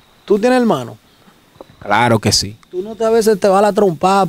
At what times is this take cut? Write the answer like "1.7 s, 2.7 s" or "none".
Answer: none